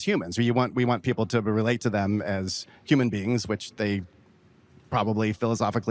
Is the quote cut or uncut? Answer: uncut